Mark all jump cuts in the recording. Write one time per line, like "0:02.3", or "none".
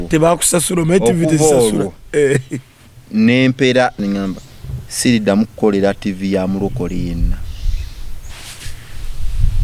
0:04.0